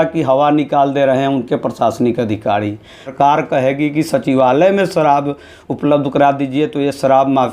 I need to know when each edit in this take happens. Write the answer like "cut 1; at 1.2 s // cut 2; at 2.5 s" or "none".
cut 1; at 3.0 s